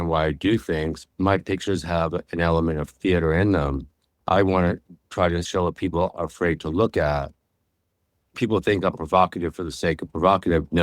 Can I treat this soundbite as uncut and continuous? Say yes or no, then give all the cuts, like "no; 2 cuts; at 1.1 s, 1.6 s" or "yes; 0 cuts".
no; 3 cuts; at 1.0 s, 4.1 s, 5.4 s